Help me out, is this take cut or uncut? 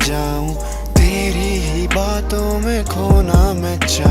uncut